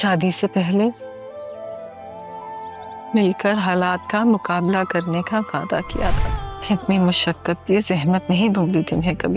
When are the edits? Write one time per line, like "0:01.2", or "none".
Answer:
0:06.2